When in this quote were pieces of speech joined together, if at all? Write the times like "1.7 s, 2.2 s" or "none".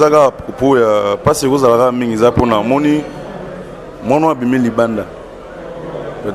none